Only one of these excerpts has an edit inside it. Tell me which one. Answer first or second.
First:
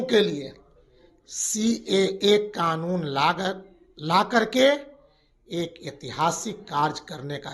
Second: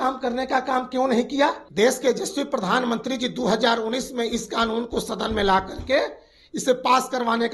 second